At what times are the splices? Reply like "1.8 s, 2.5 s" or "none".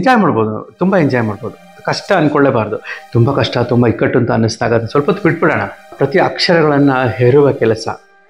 5.8 s